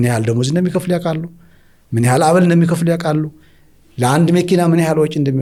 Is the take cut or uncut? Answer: uncut